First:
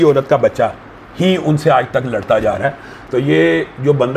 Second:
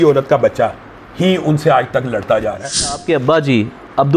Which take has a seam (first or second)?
second